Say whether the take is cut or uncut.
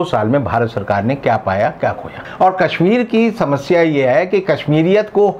cut